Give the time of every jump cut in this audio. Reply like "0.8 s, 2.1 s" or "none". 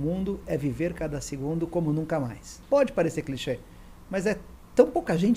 2.5 s